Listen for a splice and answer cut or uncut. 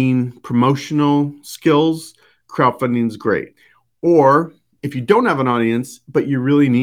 uncut